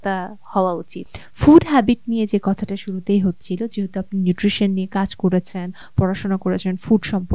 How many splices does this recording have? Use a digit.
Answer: 0